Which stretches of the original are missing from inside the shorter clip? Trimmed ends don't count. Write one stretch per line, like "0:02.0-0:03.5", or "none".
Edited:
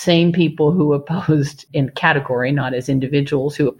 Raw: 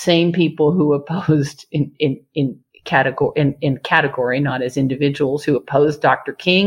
0:01.7-0:03.6